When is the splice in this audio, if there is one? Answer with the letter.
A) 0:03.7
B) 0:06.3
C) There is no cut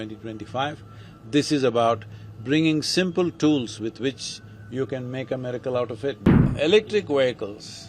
B